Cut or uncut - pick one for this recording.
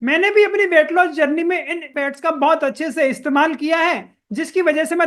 cut